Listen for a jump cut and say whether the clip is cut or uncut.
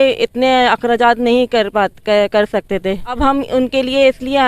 cut